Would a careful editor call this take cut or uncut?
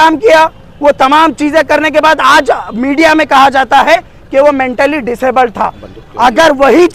uncut